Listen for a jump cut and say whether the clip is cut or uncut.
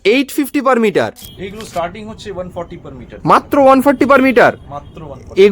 cut